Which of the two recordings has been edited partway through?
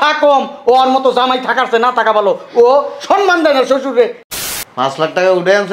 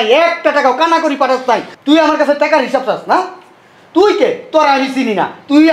first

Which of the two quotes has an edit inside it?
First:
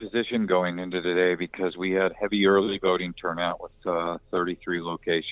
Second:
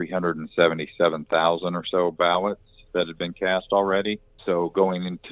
second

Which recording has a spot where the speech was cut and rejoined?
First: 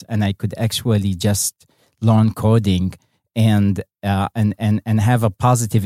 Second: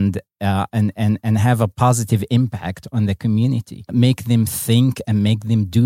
second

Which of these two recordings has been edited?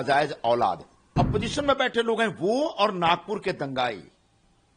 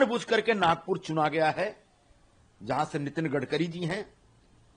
first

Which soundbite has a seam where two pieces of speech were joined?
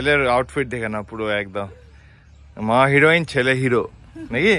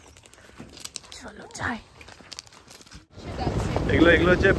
second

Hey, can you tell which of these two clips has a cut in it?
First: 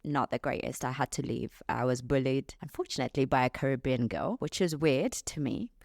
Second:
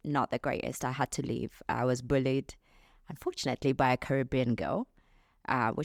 first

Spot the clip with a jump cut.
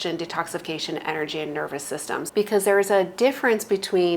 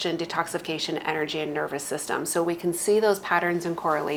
first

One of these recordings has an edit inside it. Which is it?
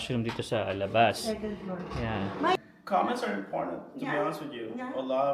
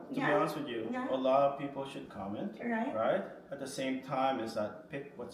first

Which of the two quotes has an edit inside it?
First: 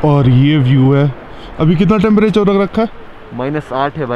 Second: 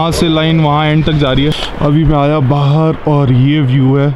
second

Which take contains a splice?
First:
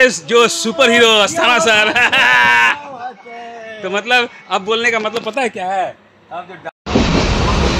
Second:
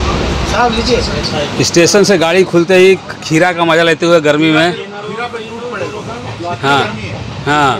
first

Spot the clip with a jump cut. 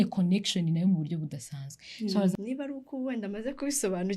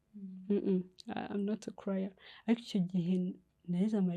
first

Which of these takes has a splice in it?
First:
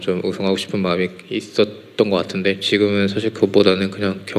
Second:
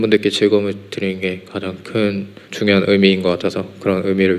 second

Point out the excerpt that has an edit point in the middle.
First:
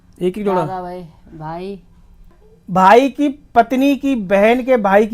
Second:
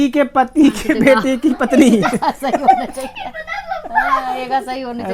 first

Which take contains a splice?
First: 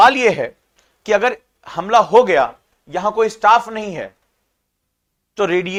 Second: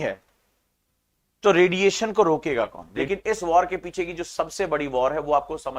second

